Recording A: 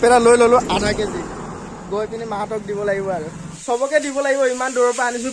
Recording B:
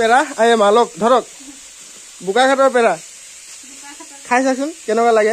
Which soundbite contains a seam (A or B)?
A